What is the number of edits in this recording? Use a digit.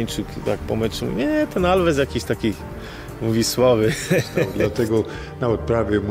1